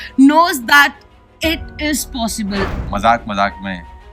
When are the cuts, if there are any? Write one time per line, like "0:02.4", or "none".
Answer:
0:02.8